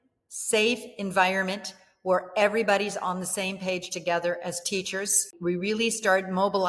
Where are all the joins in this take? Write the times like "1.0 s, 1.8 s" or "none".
5.3 s